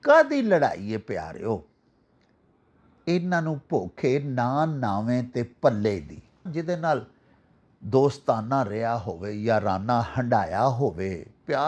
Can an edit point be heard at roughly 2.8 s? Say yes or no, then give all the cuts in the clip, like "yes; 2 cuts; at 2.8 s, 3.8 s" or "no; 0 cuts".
no; 1 cut; at 6.5 s